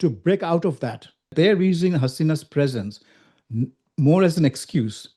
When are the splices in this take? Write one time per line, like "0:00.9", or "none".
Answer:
0:01.3